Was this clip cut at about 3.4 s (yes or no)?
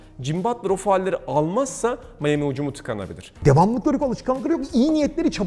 yes